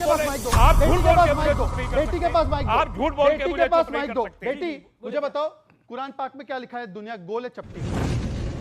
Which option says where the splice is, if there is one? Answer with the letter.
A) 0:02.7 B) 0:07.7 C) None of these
B